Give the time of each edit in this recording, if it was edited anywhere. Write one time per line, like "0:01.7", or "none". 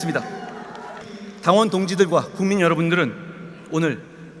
0:01.1